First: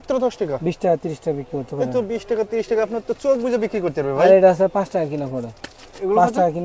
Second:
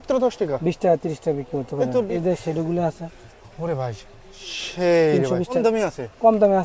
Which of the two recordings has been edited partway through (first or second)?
second